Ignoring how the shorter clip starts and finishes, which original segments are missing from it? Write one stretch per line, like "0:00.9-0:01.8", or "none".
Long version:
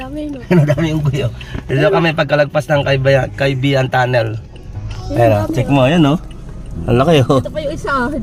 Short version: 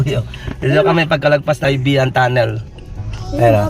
0:02.7-0:03.4